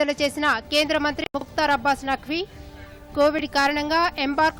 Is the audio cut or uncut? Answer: uncut